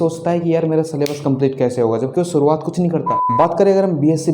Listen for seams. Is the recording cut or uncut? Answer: cut